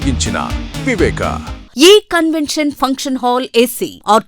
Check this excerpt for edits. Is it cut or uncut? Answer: cut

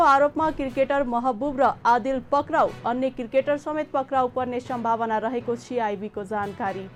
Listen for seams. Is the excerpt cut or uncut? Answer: uncut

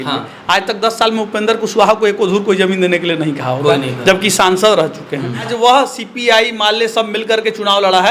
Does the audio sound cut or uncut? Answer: cut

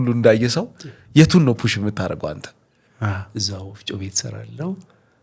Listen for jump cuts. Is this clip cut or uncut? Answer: cut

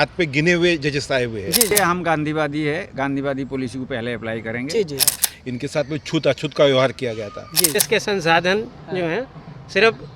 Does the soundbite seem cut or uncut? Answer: cut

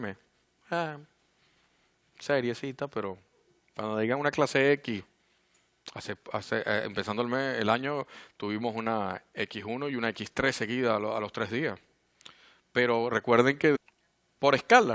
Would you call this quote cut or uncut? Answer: uncut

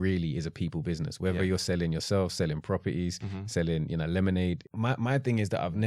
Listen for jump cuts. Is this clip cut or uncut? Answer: cut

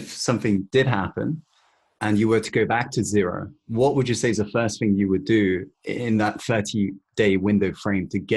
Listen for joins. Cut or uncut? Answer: uncut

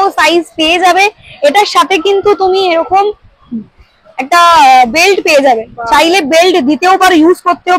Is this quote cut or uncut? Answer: uncut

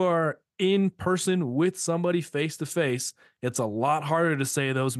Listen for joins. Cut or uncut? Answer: uncut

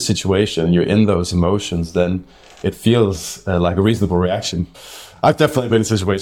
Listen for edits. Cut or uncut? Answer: uncut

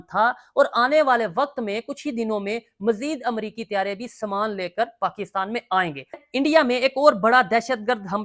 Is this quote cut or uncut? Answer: cut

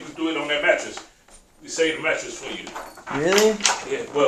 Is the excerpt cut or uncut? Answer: uncut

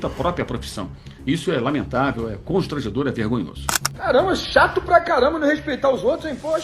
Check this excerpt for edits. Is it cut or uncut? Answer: cut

